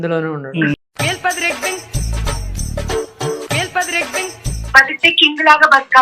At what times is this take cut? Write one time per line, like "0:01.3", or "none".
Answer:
0:00.7
0:04.6